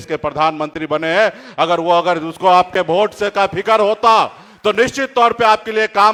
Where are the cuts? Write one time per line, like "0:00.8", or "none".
none